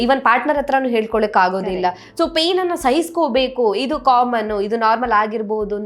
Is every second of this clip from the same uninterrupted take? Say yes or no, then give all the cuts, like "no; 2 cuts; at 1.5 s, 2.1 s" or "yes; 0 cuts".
yes; 0 cuts